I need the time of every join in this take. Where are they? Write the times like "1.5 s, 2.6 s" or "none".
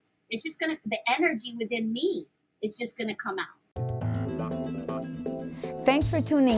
3.6 s